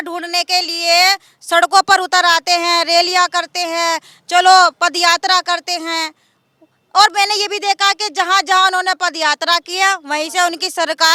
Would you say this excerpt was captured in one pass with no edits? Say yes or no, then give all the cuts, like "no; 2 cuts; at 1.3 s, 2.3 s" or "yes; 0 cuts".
yes; 0 cuts